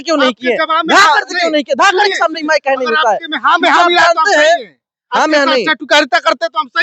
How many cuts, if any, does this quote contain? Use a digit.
0